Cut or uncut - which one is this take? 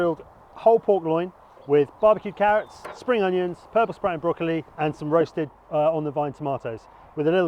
cut